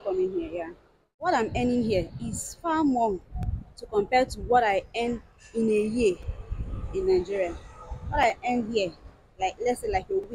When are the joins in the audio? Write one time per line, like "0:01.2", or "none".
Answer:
0:01.3